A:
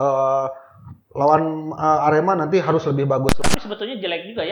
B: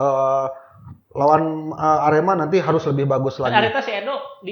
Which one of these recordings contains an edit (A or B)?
A